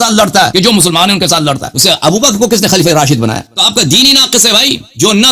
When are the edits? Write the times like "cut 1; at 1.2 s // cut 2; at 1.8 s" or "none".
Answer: cut 1; at 1.7 s // cut 2; at 3.5 s